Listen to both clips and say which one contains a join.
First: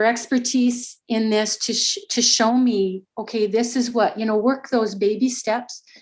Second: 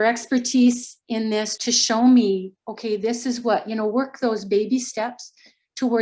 second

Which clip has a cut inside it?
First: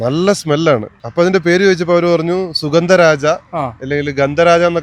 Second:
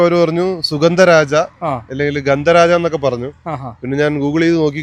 first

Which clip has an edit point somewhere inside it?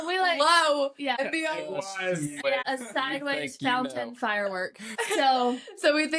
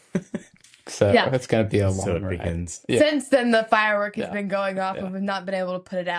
first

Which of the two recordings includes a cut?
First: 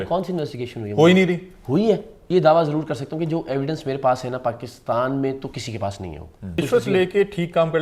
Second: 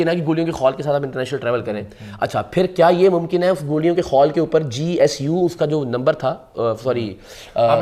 first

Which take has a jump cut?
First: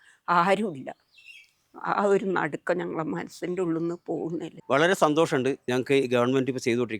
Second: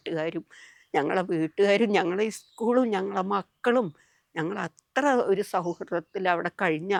first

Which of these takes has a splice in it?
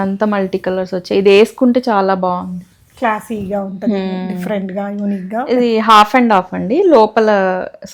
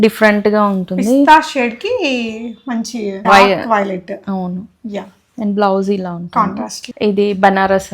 second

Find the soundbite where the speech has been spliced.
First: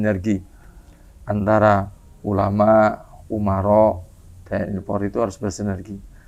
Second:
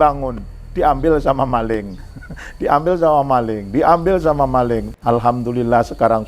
second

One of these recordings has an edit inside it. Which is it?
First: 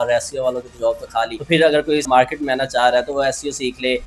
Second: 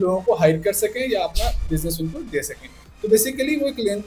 first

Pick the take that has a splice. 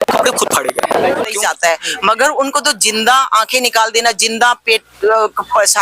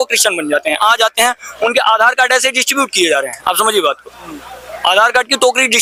first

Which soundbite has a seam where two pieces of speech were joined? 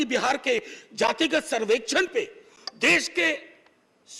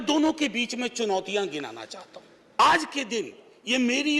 second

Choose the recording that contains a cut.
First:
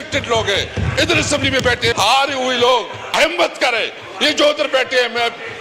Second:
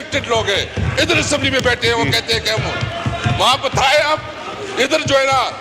first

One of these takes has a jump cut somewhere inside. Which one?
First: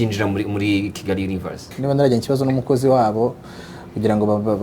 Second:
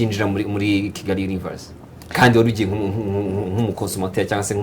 first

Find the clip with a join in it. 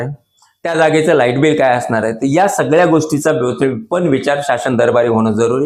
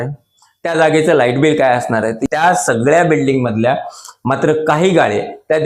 second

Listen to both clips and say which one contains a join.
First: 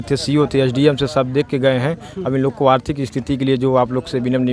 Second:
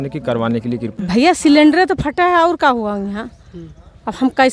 second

